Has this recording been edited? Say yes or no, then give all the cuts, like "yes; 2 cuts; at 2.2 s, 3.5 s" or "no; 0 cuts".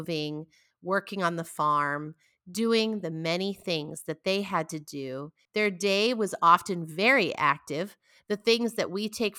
yes; 1 cut; at 5.3 s